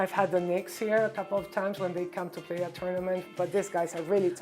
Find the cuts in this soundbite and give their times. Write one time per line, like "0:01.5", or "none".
0:03.3

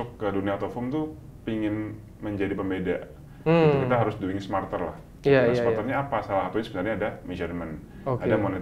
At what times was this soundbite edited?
none

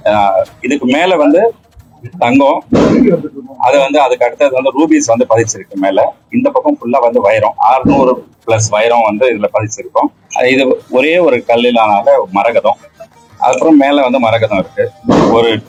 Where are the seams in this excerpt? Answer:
none

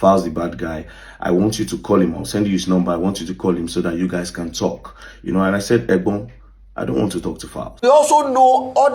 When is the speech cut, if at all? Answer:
0:07.9

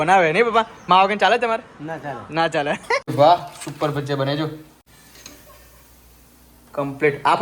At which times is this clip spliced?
0:03.0
0:04.8

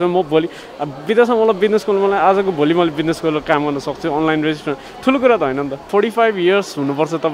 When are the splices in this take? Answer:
0:05.9

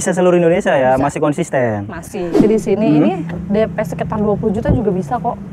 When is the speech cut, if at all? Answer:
0:02.4

